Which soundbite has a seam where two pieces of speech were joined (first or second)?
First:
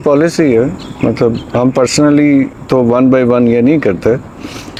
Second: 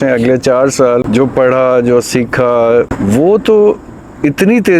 second